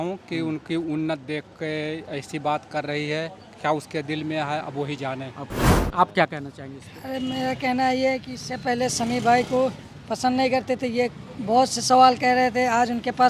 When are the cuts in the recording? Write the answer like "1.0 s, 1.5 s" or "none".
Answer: 5.6 s